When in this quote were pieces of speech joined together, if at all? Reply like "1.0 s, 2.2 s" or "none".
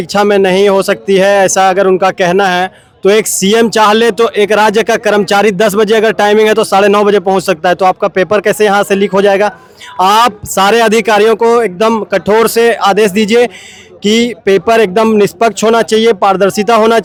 none